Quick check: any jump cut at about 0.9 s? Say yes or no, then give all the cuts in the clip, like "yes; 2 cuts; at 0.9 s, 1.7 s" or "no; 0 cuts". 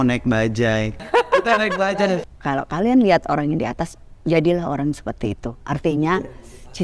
yes; 2 cuts; at 0.9 s, 2.2 s